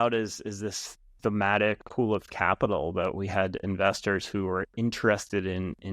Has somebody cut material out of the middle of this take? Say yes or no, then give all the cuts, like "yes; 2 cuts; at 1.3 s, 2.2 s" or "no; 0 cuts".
yes; 1 cut; at 1.8 s